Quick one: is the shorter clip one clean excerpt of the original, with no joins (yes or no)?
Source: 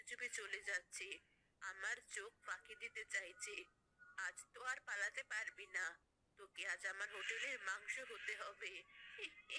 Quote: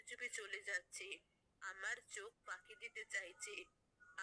yes